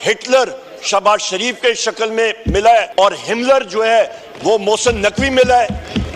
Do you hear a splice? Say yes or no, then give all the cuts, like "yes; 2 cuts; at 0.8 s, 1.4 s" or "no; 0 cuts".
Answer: yes; 1 cut; at 2.9 s